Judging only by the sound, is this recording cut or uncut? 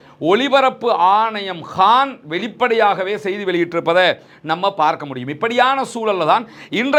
uncut